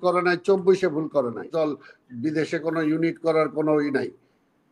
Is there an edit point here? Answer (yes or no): yes